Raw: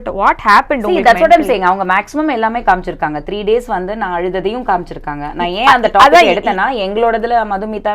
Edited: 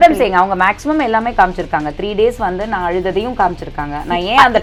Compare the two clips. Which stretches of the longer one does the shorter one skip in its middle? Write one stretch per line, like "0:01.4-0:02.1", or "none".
none